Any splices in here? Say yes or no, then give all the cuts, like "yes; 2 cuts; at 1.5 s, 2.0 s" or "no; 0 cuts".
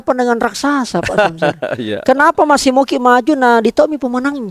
no; 0 cuts